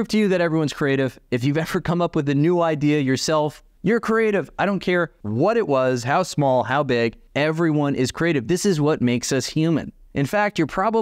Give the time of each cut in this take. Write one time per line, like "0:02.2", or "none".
0:03.7
0:05.2
0:07.2